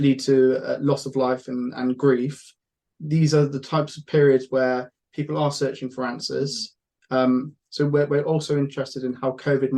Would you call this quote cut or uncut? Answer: uncut